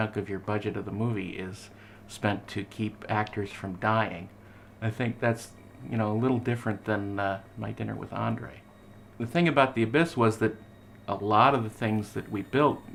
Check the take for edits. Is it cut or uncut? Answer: uncut